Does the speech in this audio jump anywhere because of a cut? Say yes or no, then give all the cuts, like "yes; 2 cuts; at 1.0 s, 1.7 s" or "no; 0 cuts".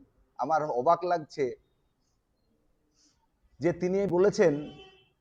no; 0 cuts